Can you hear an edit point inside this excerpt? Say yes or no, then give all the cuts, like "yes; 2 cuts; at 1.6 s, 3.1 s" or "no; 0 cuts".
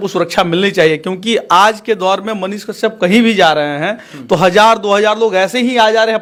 no; 0 cuts